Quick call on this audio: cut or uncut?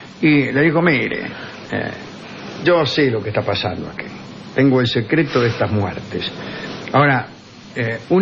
uncut